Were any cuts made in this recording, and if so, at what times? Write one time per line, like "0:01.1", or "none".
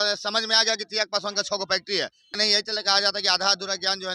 0:02.3

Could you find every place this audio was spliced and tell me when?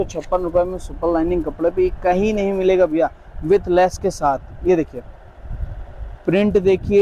none

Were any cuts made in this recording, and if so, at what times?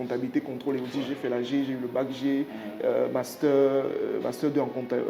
none

